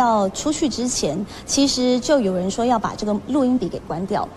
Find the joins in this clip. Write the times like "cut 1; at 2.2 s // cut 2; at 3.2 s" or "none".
none